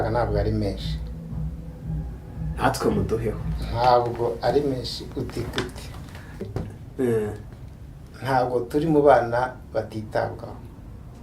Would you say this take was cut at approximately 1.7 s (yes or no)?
no